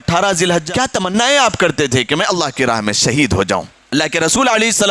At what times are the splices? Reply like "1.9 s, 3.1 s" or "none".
1.0 s, 3.8 s